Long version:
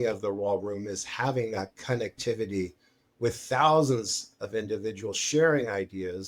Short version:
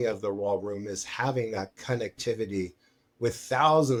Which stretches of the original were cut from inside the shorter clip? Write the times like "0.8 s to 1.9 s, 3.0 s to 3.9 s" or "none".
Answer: none